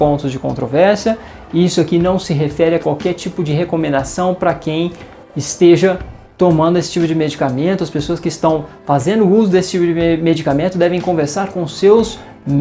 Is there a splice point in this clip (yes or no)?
no